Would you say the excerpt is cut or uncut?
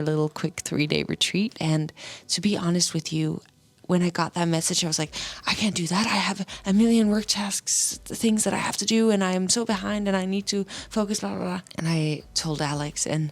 cut